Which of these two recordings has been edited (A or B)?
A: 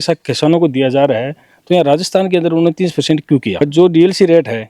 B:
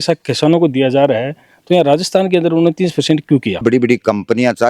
B